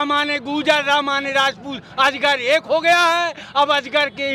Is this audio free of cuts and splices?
yes; 0 cuts

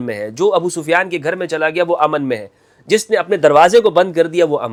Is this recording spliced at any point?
no; 0 cuts

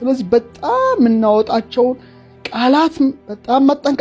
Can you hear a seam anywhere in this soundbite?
no; 0 cuts

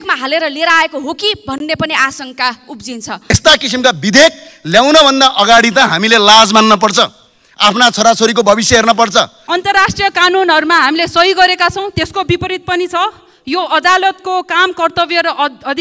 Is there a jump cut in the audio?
yes; 2 cuts; at 3.3 s, 9.4 s

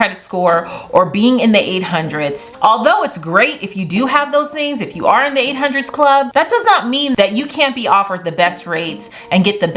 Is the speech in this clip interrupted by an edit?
yes; 2 cuts; at 2.4 s, 7.1 s

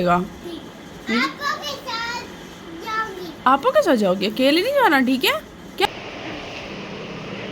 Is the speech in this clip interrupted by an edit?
yes; 1 cut; at 5.9 s

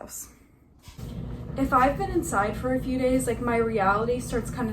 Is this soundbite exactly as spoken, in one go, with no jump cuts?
no; 1 cut; at 1.0 s

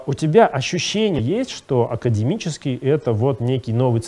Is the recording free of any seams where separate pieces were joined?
no; 1 cut; at 1.2 s

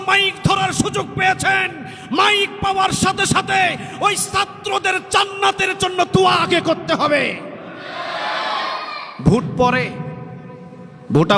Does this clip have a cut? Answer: no; 0 cuts

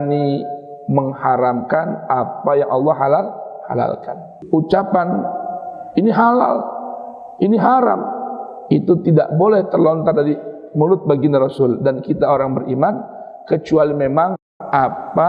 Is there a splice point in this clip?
yes; 1 cut; at 4.3 s

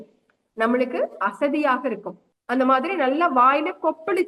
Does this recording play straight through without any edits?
no; 1 cut; at 2.3 s

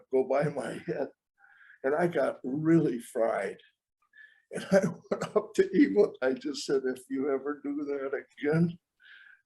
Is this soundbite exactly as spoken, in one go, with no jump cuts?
no; 1 cut; at 6.1 s

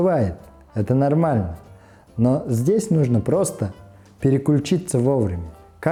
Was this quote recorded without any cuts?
yes; 0 cuts

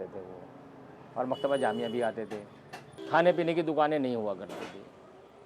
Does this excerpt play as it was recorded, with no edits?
yes; 0 cuts

